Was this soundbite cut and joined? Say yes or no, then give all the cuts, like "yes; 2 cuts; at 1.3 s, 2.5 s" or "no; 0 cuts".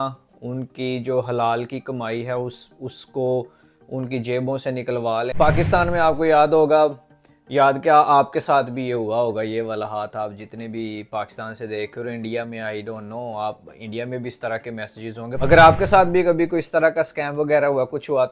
yes; 2 cuts; at 5.3 s, 15.4 s